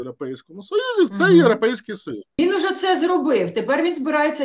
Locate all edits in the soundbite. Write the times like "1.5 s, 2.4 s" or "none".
2.3 s